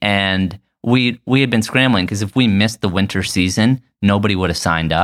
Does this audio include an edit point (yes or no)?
yes